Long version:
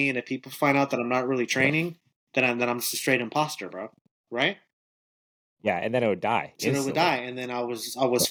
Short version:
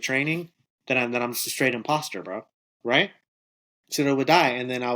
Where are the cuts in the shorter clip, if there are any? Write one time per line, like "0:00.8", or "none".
0:03.9